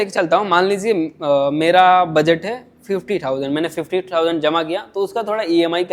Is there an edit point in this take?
no; 0 cuts

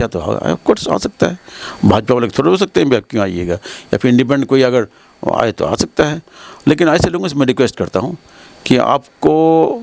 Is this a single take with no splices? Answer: yes; 0 cuts

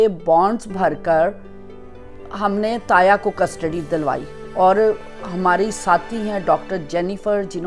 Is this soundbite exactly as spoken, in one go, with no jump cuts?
yes; 0 cuts

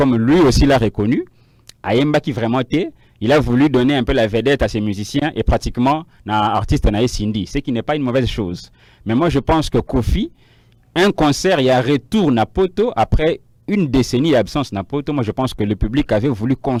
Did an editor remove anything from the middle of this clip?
no; 0 cuts

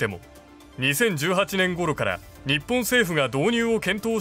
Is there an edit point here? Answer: no; 0 cuts

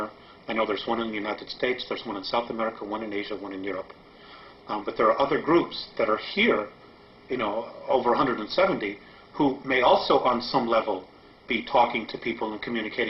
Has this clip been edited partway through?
yes; 1 cut; at 7.2 s

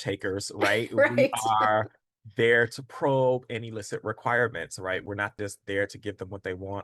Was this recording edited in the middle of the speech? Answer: yes; 1 cut; at 5.2 s

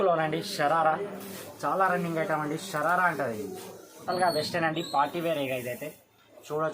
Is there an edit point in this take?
yes; 1 cut; at 4.0 s

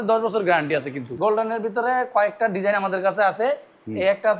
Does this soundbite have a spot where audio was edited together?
yes; 1 cut; at 1.0 s

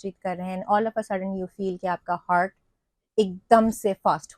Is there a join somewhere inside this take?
no; 0 cuts

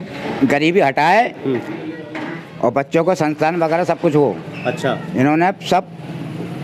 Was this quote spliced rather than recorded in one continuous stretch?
no; 0 cuts

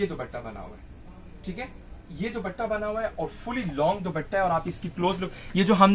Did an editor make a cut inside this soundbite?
no; 0 cuts

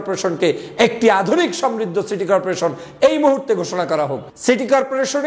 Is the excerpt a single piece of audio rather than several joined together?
no; 1 cut; at 4.2 s

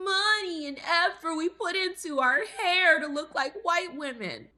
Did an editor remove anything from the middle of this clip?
no; 0 cuts

